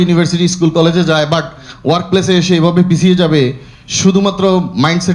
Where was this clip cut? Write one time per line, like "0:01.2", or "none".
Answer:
none